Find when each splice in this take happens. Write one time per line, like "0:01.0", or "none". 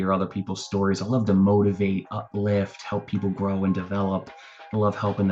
none